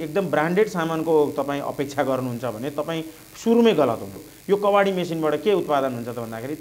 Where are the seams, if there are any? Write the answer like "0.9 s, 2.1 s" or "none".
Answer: 4.3 s